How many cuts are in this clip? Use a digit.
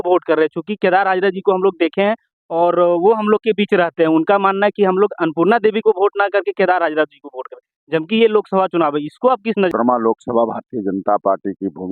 1